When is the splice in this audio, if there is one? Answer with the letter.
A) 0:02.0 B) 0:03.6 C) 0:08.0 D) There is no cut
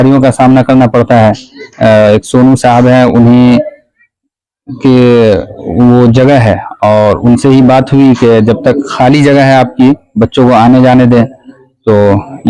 D